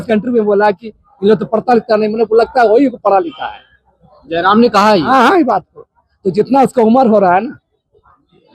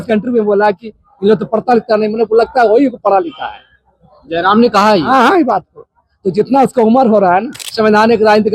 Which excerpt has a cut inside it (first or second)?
second